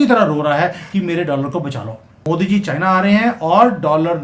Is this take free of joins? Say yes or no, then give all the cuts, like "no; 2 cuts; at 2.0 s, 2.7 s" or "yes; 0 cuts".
no; 1 cut; at 2.2 s